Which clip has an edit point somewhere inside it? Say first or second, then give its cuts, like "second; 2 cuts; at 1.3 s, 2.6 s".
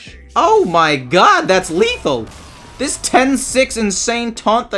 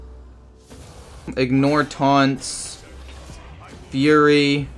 second; 1 cut; at 1.3 s